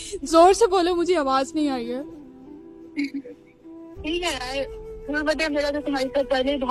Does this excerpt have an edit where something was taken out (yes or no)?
no